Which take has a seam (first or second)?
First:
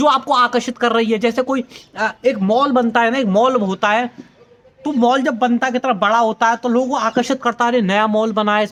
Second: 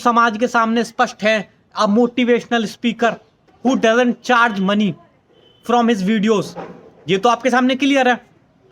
second